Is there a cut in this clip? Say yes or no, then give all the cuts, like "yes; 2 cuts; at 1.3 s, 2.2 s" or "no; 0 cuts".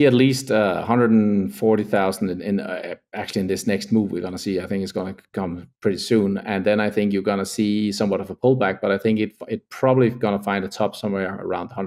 no; 0 cuts